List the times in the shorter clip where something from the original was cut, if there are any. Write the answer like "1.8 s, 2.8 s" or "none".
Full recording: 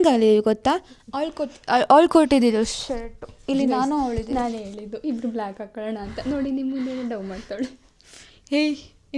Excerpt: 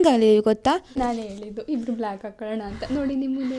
0.9 s